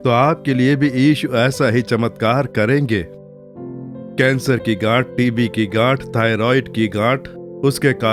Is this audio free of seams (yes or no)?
yes